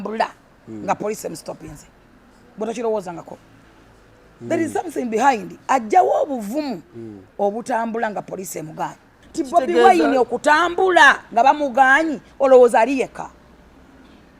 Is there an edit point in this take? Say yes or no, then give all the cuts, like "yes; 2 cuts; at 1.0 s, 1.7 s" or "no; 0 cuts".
yes; 1 cut; at 9.2 s